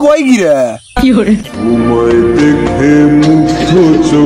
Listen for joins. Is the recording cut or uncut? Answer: cut